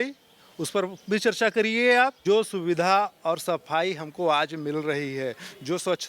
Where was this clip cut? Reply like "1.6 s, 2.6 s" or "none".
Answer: 2.2 s